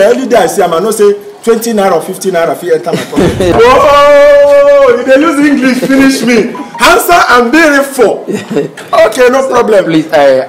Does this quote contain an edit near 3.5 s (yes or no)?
yes